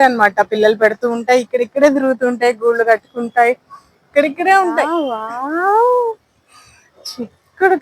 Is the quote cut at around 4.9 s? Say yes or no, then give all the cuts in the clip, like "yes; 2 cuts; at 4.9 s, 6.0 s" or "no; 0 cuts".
yes; 1 cut; at 4.9 s